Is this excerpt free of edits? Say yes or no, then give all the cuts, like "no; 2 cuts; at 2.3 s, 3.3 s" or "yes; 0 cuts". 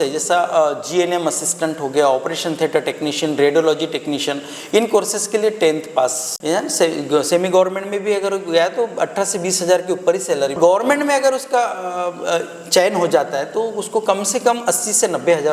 no; 2 cuts; at 6.3 s, 10.6 s